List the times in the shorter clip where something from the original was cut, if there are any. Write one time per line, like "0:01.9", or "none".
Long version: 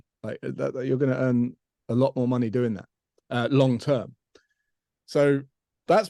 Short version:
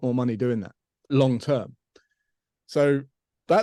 0:01.1